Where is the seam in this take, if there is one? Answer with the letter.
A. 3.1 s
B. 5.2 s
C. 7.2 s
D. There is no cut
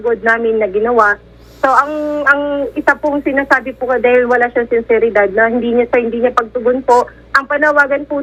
D